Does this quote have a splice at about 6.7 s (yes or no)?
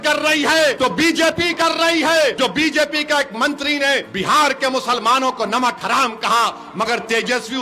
no